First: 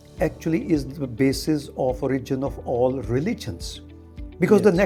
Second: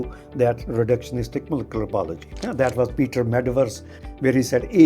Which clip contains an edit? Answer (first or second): second